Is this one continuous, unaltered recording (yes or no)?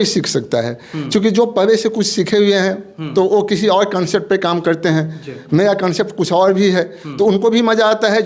yes